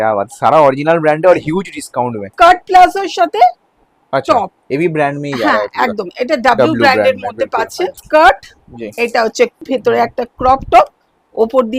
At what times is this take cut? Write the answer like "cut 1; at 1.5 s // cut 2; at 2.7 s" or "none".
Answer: cut 1; at 2.2 s // cut 2; at 8.0 s // cut 3; at 9.6 s